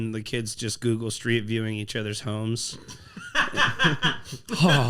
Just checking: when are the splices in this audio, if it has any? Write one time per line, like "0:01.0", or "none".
none